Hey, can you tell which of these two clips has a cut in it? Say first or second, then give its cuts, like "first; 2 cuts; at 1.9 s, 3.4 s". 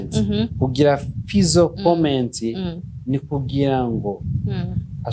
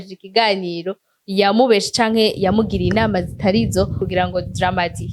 second; 1 cut; at 4.0 s